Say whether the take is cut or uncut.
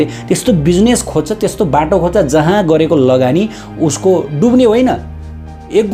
uncut